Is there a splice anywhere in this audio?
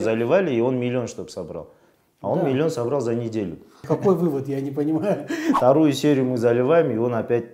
yes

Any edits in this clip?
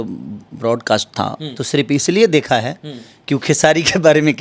yes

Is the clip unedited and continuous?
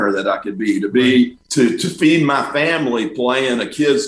no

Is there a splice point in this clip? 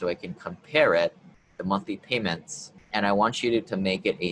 yes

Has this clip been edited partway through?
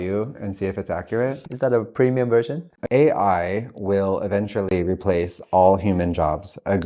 yes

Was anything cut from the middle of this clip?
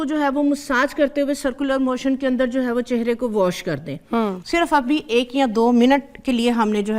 yes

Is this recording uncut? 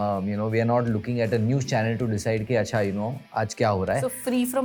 yes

